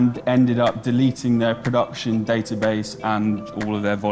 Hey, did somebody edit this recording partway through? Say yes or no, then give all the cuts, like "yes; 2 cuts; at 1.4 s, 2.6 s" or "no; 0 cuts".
no; 0 cuts